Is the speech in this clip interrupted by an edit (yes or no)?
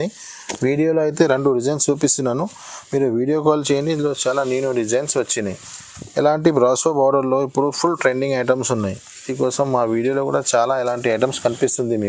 no